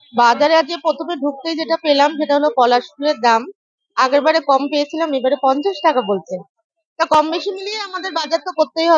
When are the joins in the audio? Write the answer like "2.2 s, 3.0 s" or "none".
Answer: none